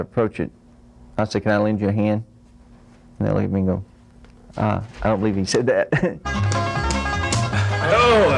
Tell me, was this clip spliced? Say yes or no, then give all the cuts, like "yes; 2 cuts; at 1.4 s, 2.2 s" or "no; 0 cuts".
yes; 1 cut; at 6.3 s